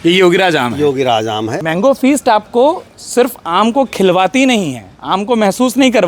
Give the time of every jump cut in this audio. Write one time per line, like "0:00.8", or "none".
0:01.5